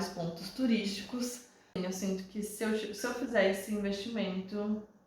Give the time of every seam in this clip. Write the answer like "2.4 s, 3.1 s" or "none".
1.8 s